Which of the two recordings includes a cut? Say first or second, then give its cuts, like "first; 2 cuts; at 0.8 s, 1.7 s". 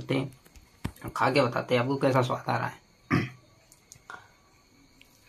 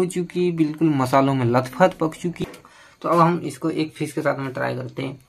second; 1 cut; at 2.4 s